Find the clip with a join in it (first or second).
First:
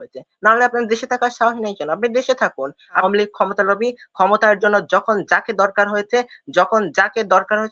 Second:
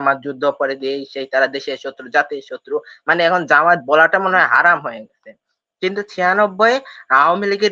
first